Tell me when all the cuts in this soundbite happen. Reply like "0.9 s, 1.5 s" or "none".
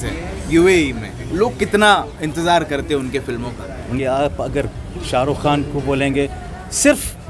1.2 s, 3.9 s

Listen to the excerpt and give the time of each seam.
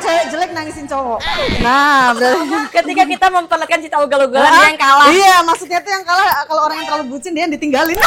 none

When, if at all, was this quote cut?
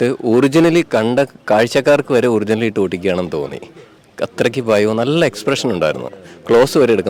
none

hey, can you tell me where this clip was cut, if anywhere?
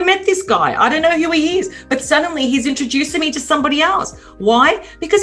none

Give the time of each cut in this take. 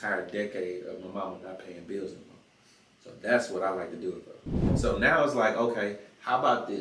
4.7 s

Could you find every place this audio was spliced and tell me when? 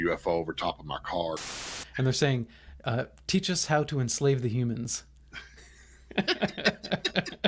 1.7 s

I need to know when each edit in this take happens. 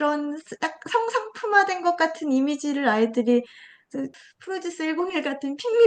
4.0 s

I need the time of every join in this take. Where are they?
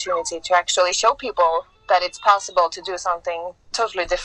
none

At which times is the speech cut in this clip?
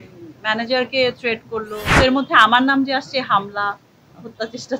1.8 s

